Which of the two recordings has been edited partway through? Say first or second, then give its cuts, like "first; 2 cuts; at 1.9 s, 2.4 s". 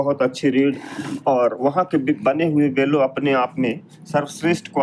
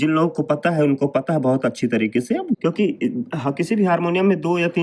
second; 1 cut; at 2.6 s